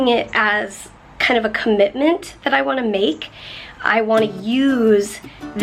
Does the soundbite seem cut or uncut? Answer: uncut